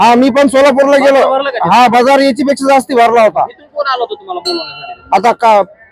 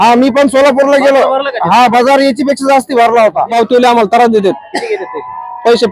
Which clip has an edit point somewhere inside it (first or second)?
second